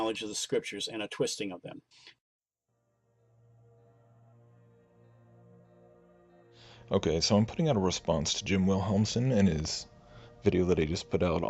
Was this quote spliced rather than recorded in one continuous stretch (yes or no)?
yes